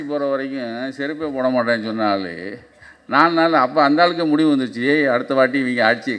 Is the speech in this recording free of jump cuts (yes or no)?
yes